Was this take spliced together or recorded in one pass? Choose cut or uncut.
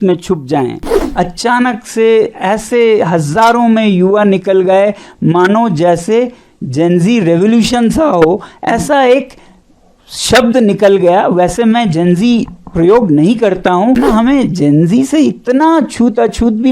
cut